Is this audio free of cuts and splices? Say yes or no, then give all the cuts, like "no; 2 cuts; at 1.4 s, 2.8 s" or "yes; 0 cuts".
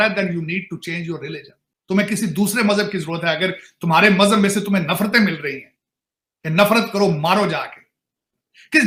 yes; 0 cuts